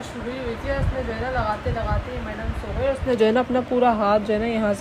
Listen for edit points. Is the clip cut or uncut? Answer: uncut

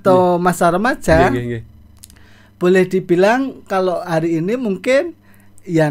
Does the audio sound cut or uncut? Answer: uncut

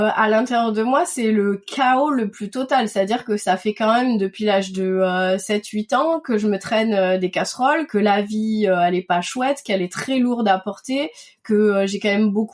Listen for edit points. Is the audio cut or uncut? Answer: cut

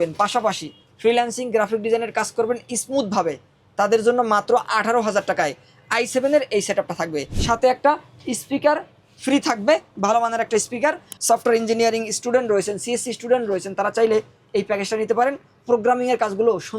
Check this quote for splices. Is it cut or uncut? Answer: cut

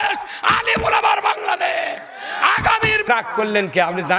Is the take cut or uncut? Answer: cut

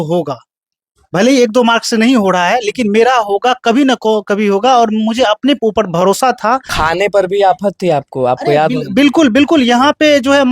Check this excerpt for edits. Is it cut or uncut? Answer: cut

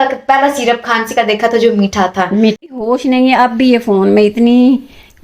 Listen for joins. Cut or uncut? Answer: cut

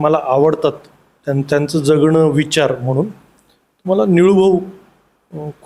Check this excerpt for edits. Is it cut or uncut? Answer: uncut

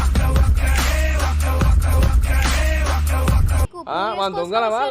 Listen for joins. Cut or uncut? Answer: cut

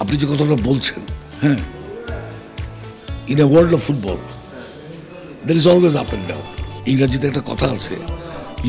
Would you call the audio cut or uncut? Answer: uncut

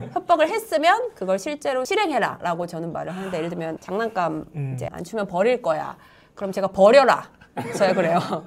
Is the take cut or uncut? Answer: uncut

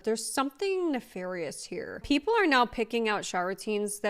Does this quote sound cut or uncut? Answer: cut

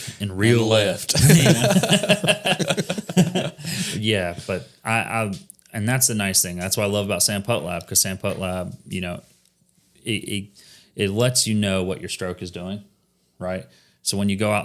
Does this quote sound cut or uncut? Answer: uncut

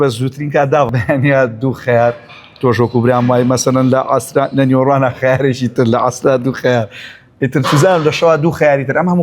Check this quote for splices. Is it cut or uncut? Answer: cut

